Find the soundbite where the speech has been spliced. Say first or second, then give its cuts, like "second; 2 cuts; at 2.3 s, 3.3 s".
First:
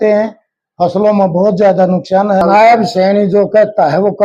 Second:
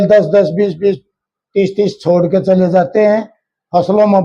first; 1 cut; at 2.4 s